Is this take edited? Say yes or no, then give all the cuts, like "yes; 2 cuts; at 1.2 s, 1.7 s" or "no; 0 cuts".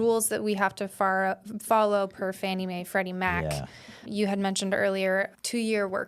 yes; 2 cuts; at 4.0 s, 5.3 s